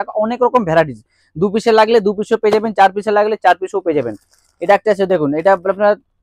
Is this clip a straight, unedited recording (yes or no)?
yes